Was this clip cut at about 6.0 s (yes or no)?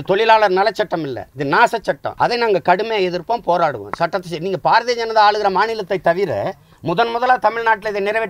no